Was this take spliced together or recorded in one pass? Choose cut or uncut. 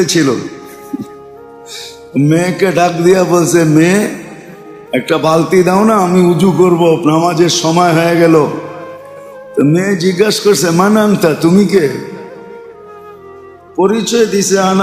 uncut